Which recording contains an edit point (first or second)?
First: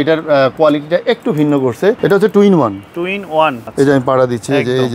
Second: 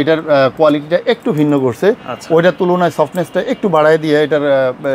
first